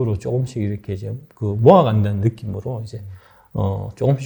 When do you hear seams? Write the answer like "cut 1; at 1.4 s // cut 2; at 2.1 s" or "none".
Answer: none